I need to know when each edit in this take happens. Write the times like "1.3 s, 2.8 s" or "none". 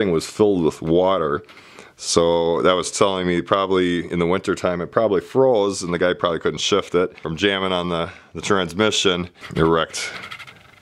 7.2 s, 9.4 s